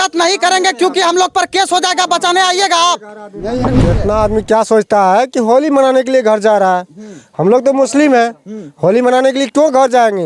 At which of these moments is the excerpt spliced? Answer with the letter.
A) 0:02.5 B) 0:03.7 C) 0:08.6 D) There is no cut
B